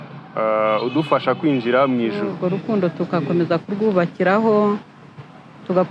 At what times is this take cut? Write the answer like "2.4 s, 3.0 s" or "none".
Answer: 2.3 s